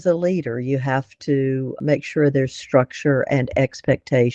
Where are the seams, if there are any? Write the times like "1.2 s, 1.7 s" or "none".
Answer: none

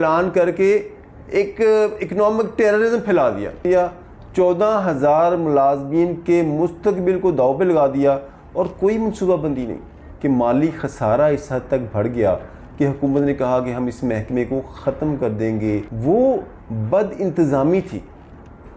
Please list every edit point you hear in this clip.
3.6 s, 10.0 s, 15.9 s

